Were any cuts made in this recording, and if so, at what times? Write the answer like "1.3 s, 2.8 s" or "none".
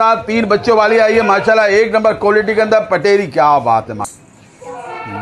4.1 s